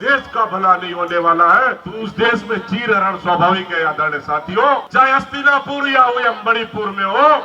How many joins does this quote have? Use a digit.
2